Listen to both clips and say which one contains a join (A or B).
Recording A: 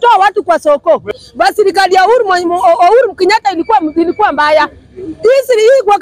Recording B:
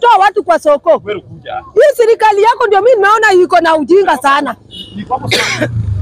A